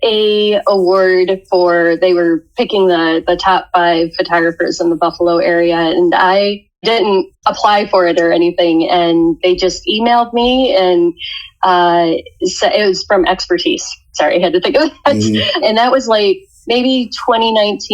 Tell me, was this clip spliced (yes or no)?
yes